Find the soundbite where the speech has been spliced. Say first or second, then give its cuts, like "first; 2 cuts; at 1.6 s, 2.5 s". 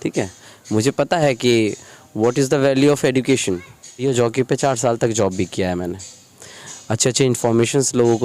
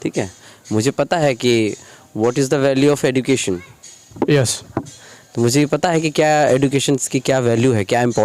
first; 1 cut; at 4.0 s